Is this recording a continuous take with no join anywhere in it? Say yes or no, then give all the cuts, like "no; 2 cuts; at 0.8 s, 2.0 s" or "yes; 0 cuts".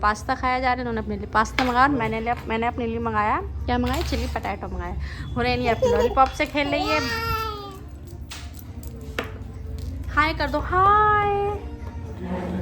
yes; 0 cuts